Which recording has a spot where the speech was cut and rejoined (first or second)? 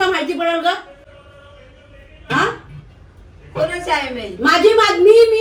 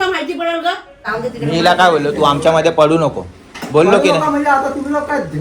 second